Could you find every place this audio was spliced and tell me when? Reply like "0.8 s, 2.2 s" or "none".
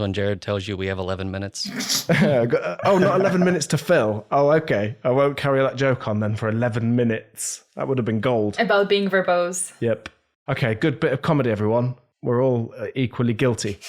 none